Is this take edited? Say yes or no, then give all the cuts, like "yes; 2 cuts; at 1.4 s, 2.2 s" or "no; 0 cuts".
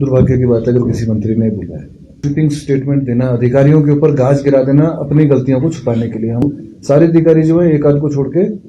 yes; 2 cuts; at 2.2 s, 6.4 s